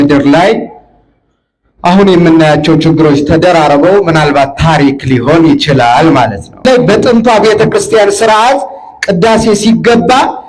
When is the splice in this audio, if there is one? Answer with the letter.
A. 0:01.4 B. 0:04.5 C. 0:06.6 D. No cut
C